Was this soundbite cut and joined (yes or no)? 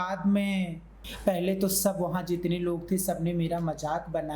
yes